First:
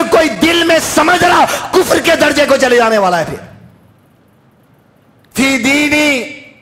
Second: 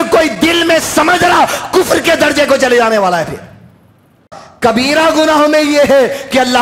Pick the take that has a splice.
second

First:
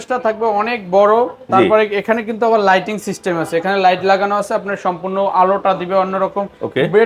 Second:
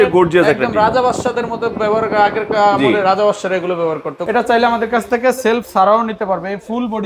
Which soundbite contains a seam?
second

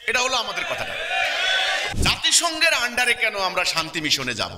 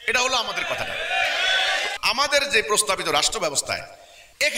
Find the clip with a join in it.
first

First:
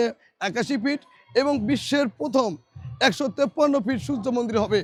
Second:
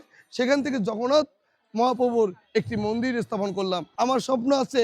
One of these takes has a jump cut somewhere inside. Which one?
second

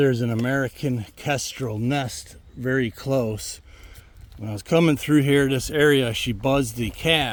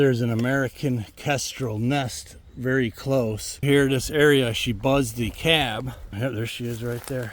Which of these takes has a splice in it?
second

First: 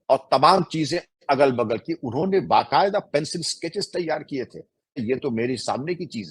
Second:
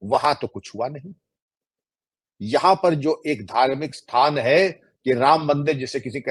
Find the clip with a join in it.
first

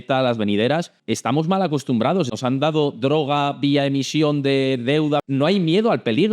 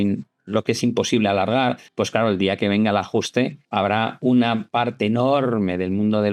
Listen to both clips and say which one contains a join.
first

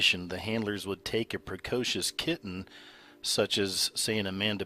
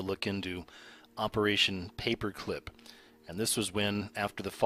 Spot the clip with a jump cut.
first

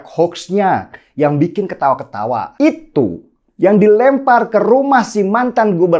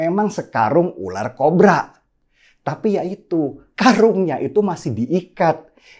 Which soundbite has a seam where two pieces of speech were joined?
first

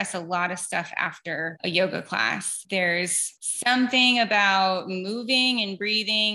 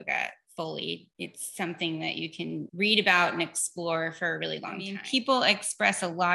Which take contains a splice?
second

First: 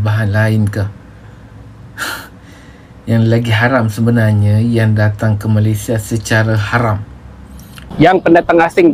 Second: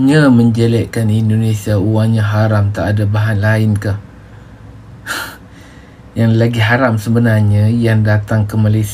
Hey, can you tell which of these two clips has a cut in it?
first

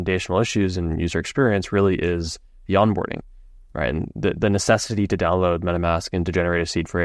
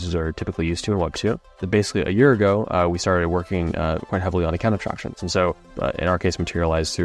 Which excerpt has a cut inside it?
second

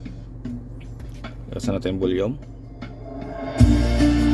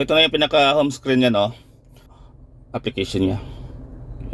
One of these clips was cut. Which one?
second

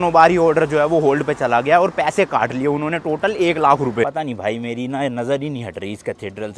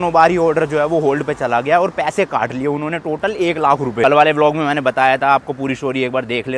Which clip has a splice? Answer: first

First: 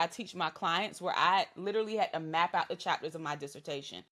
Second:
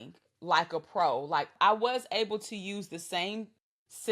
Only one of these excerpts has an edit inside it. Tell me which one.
second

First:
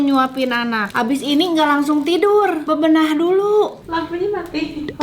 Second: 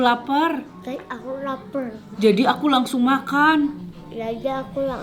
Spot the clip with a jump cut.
first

